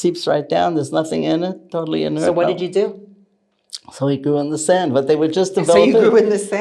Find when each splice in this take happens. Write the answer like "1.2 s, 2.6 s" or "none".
none